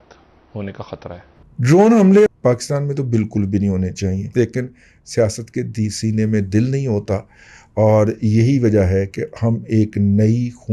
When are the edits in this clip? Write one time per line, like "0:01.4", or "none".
0:01.4
0:02.3
0:04.2